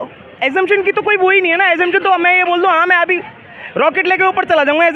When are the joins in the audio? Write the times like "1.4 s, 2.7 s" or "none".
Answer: none